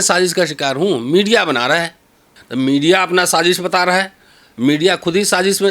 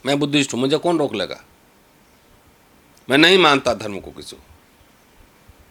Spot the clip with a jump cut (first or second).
first